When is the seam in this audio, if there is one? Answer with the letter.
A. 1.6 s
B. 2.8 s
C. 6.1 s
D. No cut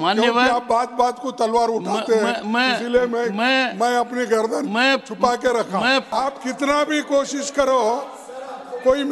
C